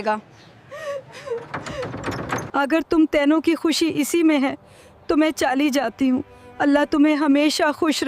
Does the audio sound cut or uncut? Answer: uncut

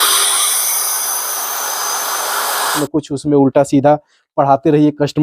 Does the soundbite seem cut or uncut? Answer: cut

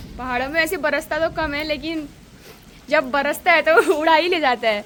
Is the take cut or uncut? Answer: uncut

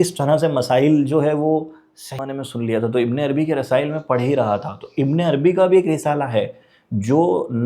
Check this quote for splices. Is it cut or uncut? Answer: cut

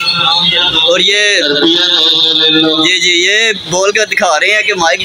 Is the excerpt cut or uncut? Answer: uncut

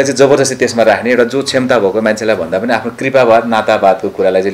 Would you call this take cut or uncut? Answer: uncut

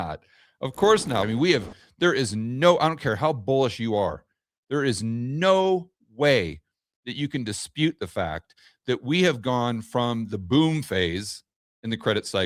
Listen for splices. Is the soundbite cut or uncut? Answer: cut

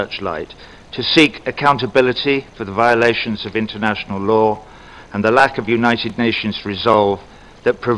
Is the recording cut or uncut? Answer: cut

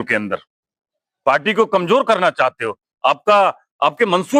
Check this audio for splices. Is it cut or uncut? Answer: uncut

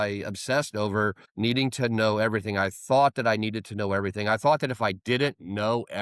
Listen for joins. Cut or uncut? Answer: cut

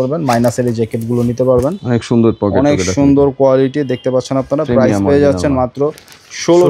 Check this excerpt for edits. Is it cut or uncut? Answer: uncut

